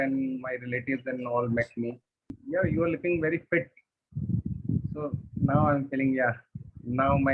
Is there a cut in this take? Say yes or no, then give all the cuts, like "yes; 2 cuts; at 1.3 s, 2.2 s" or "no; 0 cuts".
yes; 1 cut; at 2.4 s